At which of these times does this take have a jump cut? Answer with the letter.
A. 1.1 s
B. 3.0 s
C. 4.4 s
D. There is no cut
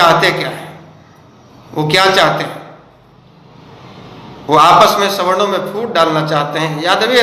D